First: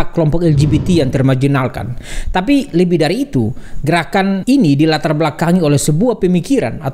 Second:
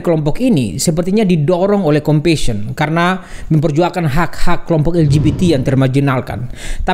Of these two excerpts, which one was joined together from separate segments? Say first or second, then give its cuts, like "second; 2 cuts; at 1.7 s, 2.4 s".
first; 1 cut; at 4.4 s